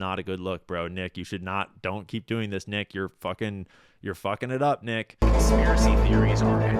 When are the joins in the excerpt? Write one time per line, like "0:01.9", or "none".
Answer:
0:05.1